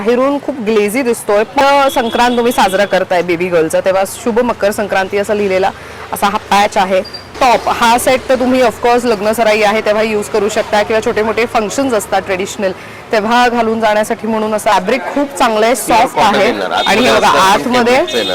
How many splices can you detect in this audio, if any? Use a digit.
3